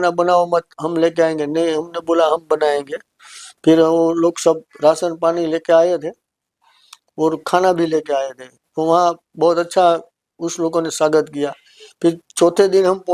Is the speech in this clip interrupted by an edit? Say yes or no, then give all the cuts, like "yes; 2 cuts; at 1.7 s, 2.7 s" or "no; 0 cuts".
no; 0 cuts